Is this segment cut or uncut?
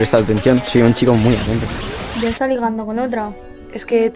uncut